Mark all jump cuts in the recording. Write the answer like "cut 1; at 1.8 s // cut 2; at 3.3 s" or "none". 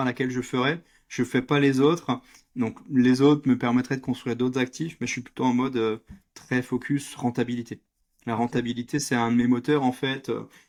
none